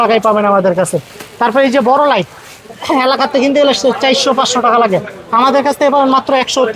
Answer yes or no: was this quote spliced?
no